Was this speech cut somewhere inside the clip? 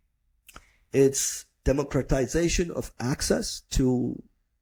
no; 0 cuts

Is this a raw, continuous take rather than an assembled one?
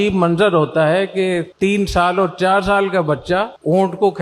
yes; 0 cuts

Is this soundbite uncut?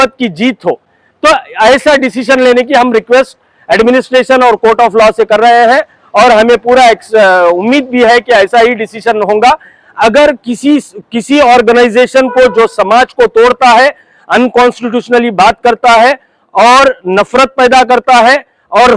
yes; 0 cuts

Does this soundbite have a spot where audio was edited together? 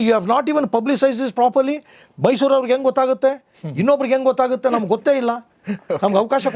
no; 0 cuts

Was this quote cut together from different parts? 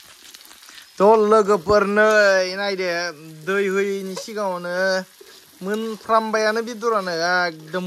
no; 0 cuts

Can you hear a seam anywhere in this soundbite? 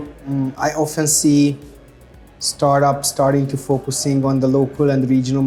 no; 0 cuts

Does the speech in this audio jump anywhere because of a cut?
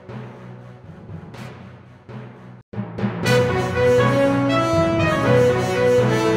no; 0 cuts

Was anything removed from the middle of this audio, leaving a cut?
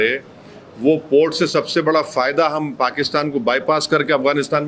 no; 0 cuts

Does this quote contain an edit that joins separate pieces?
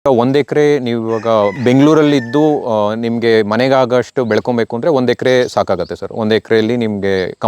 yes; 1 cut; at 1.6 s

